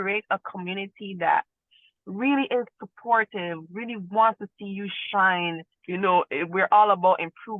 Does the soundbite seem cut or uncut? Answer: cut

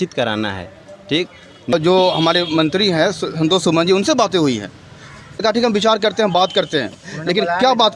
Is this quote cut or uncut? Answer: cut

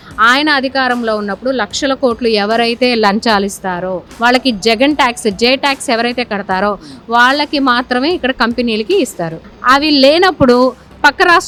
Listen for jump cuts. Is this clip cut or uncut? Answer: uncut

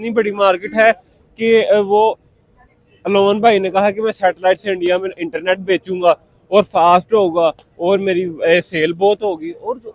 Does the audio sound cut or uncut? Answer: uncut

